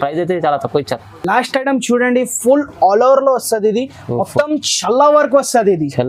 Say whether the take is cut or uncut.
uncut